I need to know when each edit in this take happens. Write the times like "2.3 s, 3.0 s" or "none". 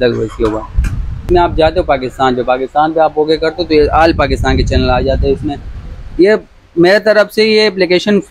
1.2 s